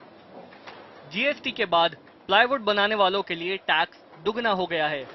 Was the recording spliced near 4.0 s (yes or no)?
yes